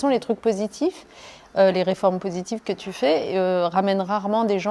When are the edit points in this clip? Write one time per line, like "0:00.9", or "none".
none